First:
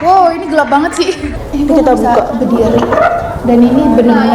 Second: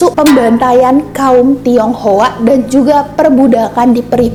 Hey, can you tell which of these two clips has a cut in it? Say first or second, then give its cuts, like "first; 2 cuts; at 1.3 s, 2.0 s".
first; 1 cut; at 1.2 s